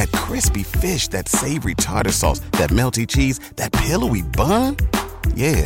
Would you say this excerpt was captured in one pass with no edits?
yes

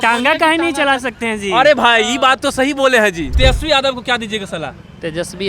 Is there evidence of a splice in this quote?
yes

